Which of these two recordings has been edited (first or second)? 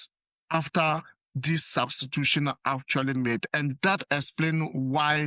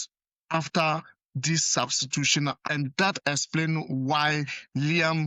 second